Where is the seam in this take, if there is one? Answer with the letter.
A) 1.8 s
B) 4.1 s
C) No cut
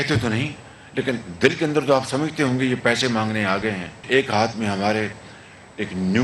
B